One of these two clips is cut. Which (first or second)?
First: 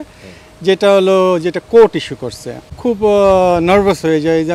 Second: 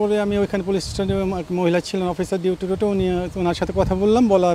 first